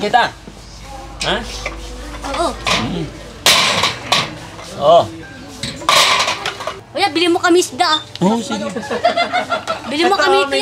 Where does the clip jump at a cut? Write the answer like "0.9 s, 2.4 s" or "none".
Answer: 6.8 s